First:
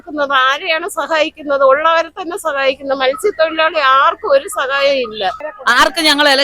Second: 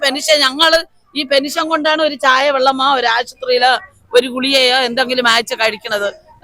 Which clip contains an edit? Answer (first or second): first